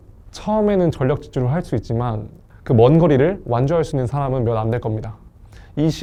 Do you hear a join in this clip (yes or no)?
no